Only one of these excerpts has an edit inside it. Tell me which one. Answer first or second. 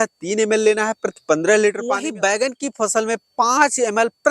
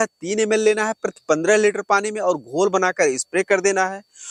first